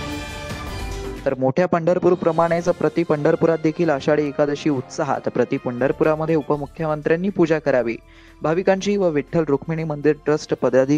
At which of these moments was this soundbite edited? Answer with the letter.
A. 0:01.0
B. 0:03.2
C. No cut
A